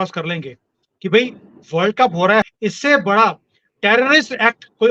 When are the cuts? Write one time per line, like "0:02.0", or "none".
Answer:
0:02.4